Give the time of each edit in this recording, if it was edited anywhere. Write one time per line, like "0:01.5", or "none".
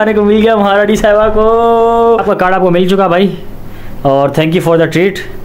0:02.2